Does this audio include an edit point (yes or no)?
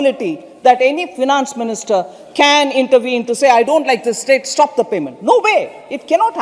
no